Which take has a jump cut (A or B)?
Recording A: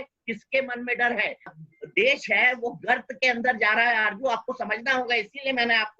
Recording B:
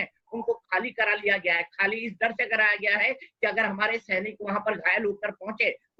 A